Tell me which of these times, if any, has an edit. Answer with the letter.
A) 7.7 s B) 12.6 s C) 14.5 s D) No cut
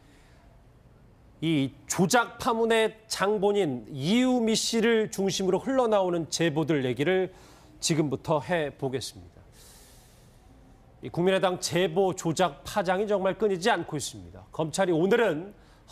D